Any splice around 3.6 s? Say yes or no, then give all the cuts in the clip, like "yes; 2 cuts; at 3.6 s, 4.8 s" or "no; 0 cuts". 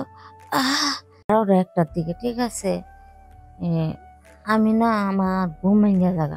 no; 1 cut; at 1.3 s